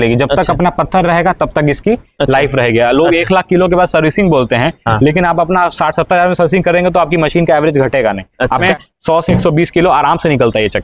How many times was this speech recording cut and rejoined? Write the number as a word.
one